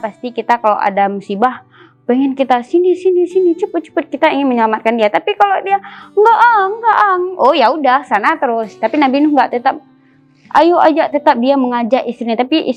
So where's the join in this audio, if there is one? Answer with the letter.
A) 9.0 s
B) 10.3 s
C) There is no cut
C